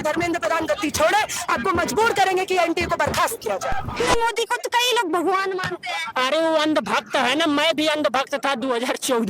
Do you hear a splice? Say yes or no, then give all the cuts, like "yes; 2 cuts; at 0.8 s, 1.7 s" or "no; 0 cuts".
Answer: yes; 1 cut; at 4.0 s